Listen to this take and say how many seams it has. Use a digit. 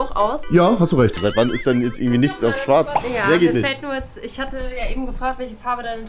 2